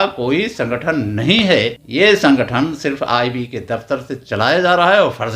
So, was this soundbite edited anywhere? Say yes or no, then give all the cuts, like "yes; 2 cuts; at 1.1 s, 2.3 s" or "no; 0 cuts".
yes; 1 cut; at 1.8 s